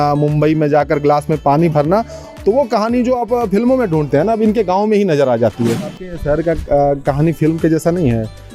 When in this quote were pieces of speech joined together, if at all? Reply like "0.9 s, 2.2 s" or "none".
5.9 s

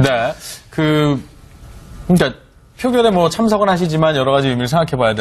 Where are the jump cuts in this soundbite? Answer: 1.0 s

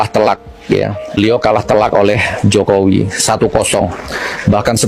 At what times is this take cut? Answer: none

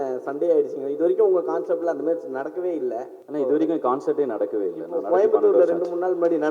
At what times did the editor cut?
3.2 s

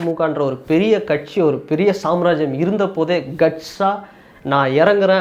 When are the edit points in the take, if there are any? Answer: none

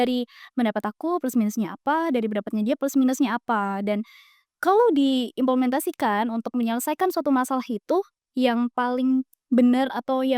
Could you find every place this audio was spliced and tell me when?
none

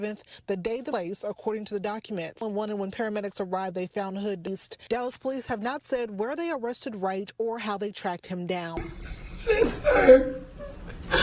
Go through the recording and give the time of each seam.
2.4 s, 8.8 s

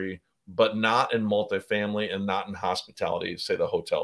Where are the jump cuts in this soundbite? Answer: none

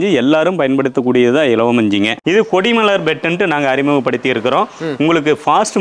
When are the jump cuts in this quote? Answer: 2.1 s

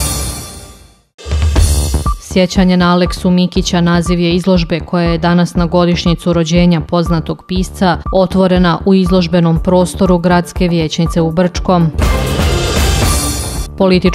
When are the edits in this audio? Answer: 1.3 s

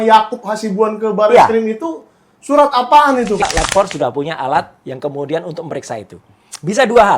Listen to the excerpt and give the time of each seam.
3.4 s

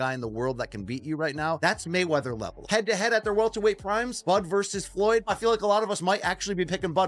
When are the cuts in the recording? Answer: none

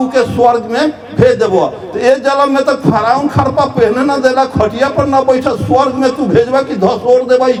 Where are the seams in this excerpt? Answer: none

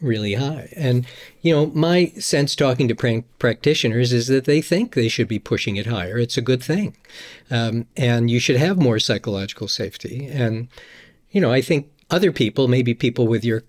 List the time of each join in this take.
11.9 s

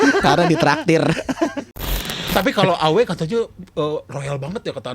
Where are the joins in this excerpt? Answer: 2.2 s

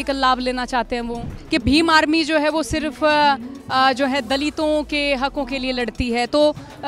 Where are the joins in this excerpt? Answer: 1.3 s

